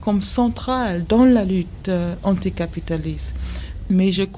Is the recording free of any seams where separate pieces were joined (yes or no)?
yes